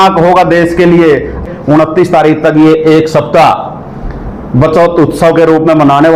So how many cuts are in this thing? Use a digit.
1